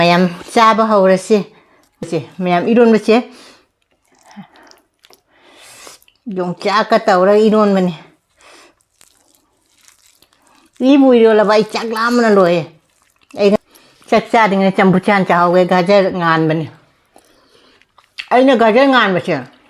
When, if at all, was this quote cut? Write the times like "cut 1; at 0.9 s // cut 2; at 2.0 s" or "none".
cut 1; at 2.0 s // cut 2; at 13.6 s